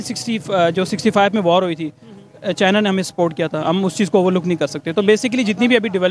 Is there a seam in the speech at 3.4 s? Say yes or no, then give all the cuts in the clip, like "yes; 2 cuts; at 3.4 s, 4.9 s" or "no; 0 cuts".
no; 0 cuts